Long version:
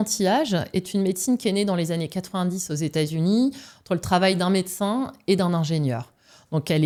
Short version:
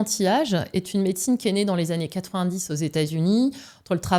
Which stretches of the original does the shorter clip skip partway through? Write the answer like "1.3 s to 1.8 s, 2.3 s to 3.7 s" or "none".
none